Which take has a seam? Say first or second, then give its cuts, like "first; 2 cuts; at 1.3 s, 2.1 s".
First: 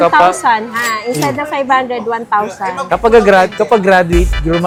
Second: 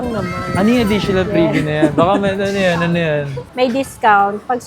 second; 1 cut; at 3.4 s